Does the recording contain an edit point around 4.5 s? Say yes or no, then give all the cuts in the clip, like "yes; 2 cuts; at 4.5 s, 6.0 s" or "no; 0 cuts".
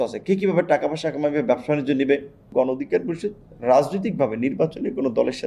no; 1 cut; at 2.4 s